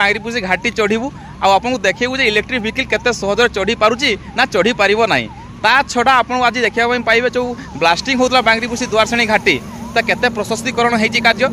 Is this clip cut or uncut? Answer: uncut